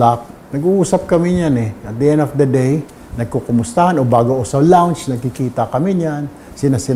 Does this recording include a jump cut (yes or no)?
no